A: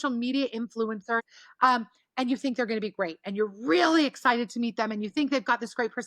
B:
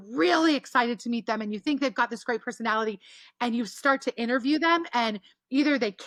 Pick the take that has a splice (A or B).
A